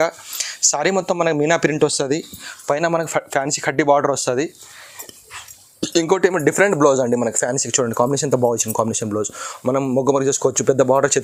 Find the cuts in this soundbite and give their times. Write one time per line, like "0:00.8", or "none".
none